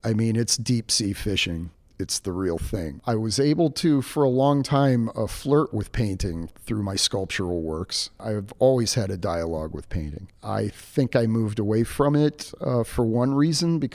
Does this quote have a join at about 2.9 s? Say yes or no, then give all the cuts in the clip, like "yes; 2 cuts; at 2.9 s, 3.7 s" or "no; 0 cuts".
yes; 1 cut; at 2.9 s